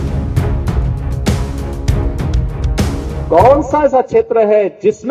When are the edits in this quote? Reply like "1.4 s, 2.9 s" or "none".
2.8 s